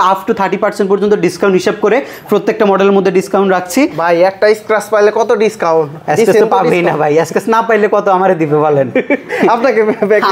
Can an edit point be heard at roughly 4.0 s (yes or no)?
yes